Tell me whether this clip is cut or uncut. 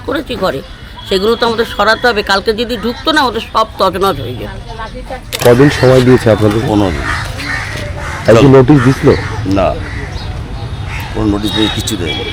cut